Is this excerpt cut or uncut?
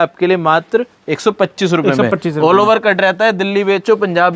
uncut